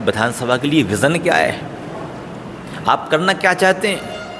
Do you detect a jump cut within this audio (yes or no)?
no